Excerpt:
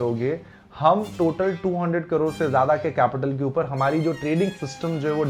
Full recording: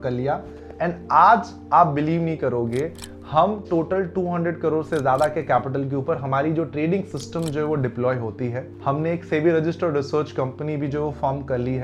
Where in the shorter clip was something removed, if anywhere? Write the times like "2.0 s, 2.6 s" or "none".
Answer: none